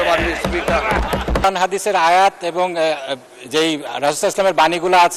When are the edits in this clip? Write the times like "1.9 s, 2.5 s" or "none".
1.4 s